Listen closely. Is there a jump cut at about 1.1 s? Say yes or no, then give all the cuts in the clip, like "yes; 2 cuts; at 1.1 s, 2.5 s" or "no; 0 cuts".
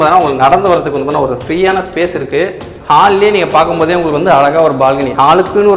no; 1 cut; at 2.7 s